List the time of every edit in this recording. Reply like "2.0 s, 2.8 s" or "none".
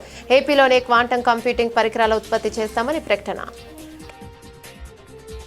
3.5 s